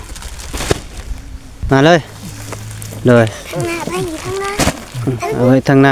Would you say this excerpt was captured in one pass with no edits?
no; 1 cut; at 1.6 s

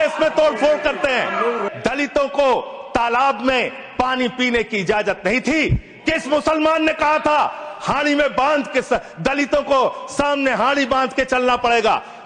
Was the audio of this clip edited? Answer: yes; 1 cut; at 1.7 s

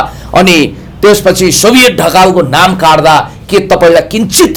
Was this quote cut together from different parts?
no; 0 cuts

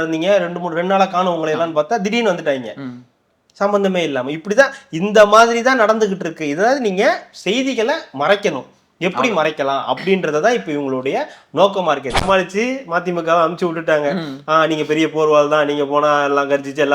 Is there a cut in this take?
yes; 1 cut; at 12.2 s

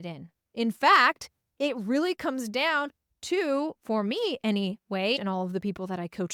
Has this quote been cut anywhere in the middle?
no; 0 cuts

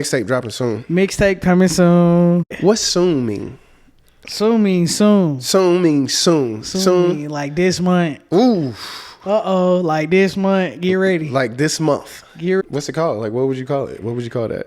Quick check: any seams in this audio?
yes; 2 cuts; at 2.5 s, 12.6 s

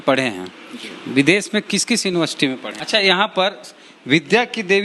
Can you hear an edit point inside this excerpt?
yes; 1 cut; at 2.7 s

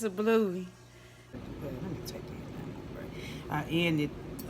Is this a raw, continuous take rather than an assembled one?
no; 1 cut; at 1.4 s

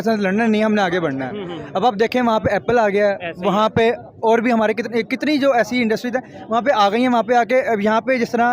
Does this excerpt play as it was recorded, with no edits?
yes; 0 cuts

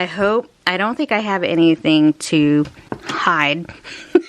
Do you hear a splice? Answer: yes; 1 cut; at 2.8 s

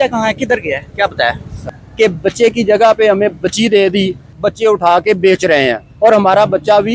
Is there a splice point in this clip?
yes; 2 cuts; at 1.7 s, 4.4 s

